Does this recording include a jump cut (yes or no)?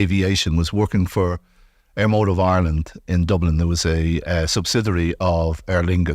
no